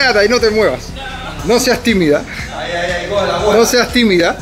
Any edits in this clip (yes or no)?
no